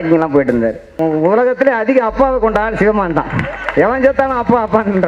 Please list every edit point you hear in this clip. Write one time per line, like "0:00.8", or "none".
0:01.0